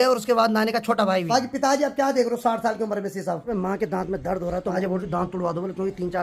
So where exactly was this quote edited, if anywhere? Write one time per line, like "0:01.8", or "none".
0:01.3
0:03.5
0:04.7